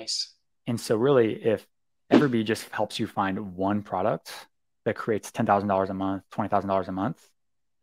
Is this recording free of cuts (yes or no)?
yes